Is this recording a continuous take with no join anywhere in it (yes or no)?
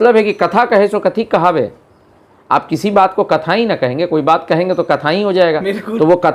yes